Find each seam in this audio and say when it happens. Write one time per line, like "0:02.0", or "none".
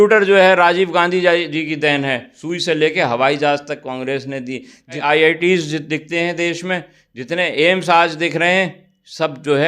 0:02.2
0:05.0